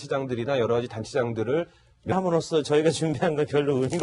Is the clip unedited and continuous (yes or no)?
yes